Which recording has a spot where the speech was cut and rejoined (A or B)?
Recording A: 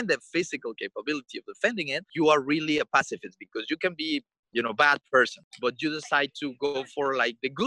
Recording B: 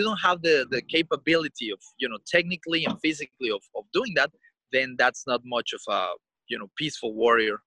A